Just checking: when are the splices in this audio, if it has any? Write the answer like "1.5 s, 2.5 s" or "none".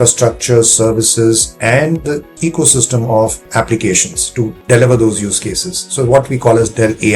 2.3 s, 3.4 s, 4.6 s